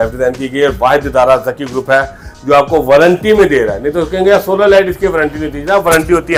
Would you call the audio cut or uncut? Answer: uncut